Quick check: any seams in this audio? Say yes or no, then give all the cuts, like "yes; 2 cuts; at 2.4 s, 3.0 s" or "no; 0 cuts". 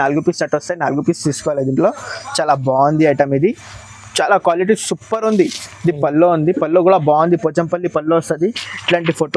no; 0 cuts